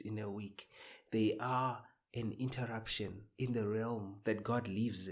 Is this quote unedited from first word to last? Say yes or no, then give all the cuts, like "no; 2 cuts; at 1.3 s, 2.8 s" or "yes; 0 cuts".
no; 2 cuts; at 3.2 s, 4.1 s